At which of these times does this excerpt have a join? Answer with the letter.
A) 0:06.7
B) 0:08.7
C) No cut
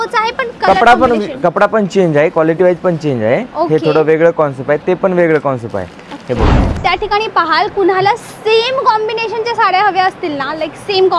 A